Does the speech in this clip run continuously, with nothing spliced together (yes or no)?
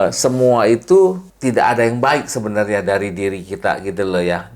no